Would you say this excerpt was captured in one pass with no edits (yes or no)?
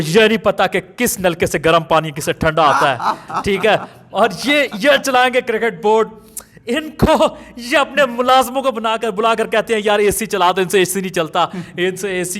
yes